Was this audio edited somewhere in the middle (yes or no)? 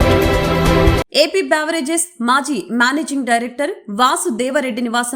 no